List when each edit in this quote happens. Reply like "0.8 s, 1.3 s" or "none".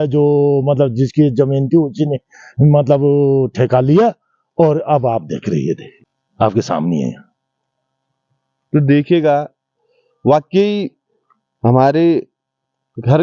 none